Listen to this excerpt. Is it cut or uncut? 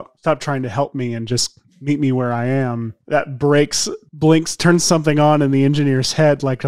cut